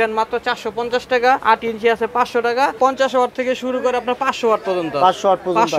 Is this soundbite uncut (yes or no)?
no